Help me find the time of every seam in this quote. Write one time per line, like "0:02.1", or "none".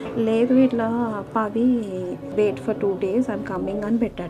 0:02.2